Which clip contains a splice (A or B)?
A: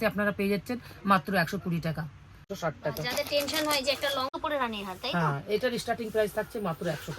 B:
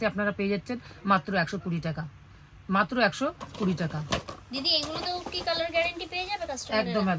A